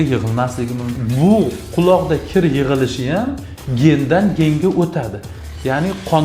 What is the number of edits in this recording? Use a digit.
1